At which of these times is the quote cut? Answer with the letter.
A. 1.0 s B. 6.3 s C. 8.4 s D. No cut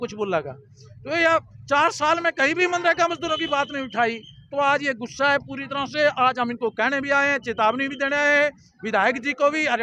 D